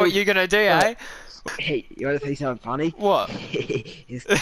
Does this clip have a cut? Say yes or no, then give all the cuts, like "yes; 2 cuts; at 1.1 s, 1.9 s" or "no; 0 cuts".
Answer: yes; 1 cut; at 1.4 s